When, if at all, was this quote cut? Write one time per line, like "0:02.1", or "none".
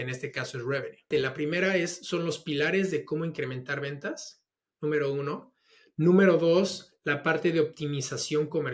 0:01.1